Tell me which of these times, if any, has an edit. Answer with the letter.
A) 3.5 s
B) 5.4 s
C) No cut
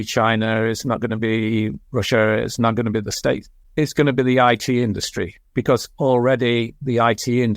A